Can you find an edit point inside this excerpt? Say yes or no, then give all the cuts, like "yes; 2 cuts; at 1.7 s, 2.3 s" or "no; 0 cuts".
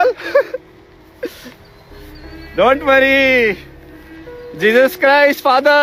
no; 0 cuts